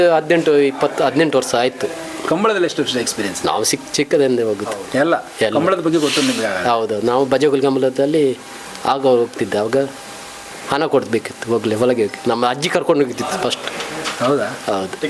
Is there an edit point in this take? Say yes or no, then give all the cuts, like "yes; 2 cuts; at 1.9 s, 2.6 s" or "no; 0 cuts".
no; 0 cuts